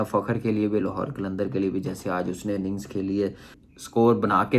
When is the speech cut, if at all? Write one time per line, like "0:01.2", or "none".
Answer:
0:03.6